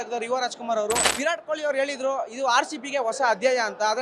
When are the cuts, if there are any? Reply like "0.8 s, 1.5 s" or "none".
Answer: 1.1 s